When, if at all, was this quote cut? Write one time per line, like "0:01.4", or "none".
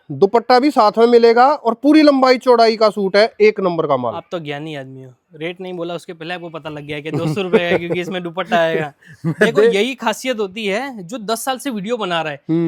none

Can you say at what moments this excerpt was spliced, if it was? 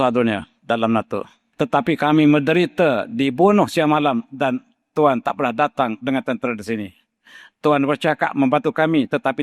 0:01.4

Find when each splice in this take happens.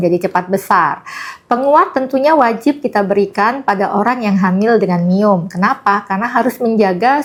none

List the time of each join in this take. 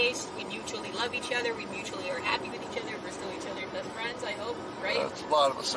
none

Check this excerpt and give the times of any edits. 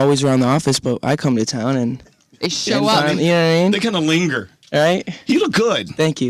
0:01.2

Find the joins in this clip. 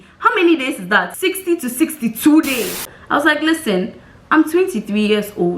0:01.1
0:02.9

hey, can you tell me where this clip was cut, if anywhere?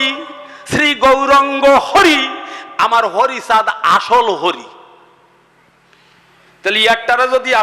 none

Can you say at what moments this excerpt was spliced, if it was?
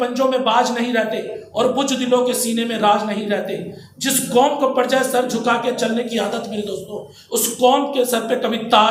none

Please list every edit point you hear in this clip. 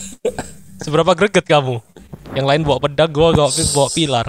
none

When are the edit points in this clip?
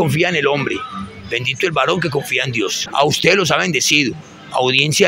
0:02.8

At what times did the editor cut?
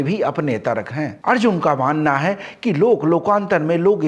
none

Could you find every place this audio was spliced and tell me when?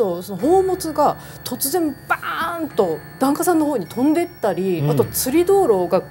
0:03.1

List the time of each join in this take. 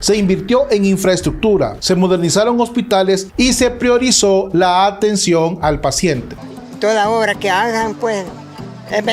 0:06.4

